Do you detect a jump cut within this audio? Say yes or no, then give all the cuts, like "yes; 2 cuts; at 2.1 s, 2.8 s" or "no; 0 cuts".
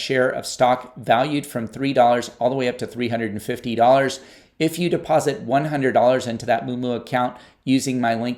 no; 0 cuts